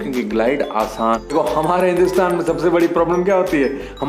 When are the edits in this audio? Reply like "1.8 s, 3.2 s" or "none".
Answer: 1.3 s